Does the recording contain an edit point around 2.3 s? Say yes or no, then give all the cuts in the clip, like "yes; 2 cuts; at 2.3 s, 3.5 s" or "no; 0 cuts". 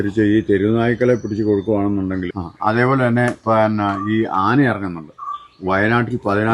yes; 1 cut; at 2.3 s